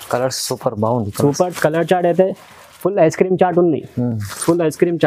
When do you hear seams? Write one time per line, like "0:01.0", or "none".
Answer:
none